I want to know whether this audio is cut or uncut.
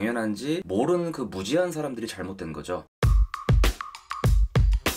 cut